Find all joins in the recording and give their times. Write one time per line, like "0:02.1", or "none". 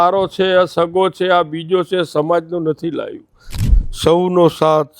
0:03.6